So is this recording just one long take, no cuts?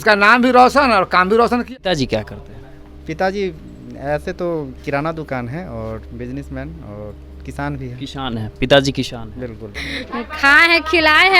no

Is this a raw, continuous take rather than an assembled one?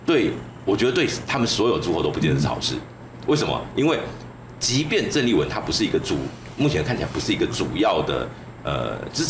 yes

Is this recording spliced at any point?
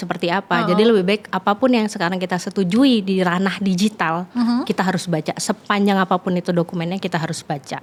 no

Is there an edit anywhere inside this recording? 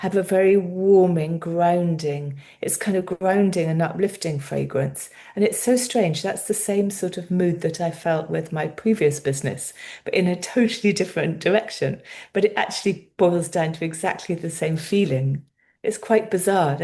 no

